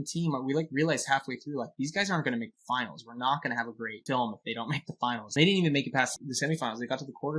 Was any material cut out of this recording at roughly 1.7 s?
no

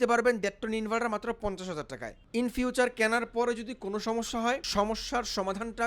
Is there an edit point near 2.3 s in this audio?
yes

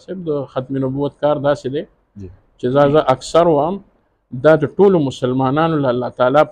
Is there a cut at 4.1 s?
no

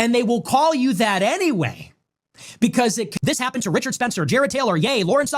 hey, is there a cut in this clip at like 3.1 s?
yes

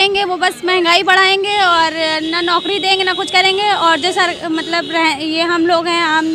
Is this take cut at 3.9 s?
no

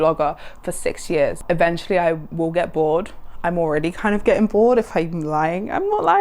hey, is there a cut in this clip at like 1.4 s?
yes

